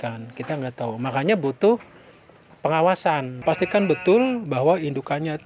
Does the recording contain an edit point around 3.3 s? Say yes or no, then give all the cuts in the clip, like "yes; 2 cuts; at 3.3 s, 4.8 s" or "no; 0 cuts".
yes; 1 cut; at 3.3 s